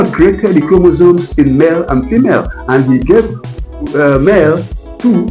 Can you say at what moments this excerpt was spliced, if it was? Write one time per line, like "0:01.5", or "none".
none